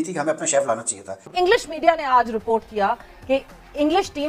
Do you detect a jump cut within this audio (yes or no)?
yes